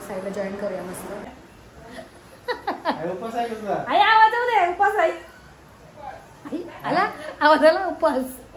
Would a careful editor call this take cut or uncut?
cut